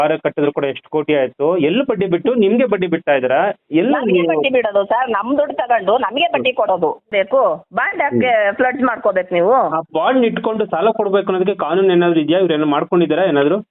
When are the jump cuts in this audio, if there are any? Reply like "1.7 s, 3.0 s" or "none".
7.1 s